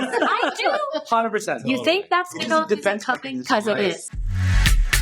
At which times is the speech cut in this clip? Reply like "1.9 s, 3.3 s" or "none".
4.1 s